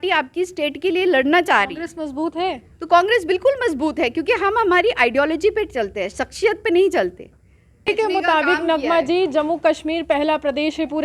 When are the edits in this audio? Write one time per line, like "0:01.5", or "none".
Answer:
0:07.9